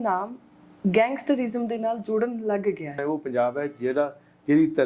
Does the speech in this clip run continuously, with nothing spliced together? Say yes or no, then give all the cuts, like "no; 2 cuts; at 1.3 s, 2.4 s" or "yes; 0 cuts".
no; 1 cut; at 3.0 s